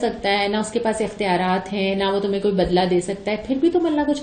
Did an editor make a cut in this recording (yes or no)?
no